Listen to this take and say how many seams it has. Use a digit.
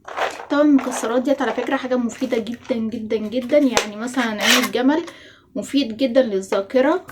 0